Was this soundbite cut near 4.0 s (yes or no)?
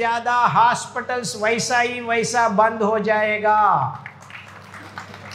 no